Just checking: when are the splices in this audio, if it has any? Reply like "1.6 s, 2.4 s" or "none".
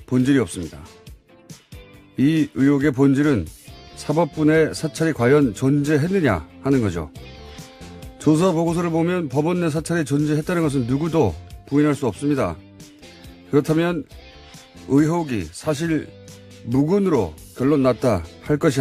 15.8 s